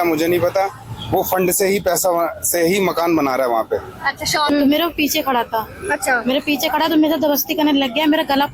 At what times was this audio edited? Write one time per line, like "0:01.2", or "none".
0:04.5